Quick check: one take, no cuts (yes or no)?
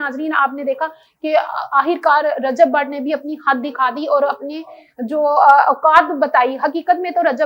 yes